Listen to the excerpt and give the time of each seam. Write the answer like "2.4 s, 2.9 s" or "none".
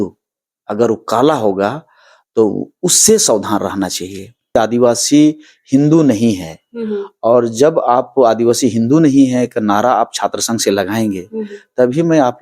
4.6 s